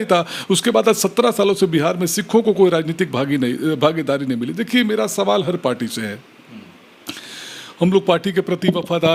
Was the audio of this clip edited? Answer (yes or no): no